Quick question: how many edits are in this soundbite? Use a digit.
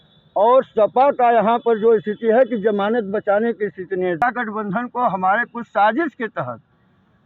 1